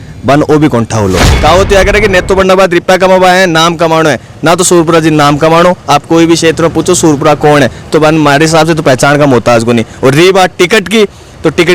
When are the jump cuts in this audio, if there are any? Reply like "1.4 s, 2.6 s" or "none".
1.3 s